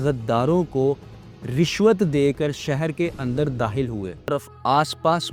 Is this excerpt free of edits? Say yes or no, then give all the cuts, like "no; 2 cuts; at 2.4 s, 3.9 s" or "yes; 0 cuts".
no; 1 cut; at 4.4 s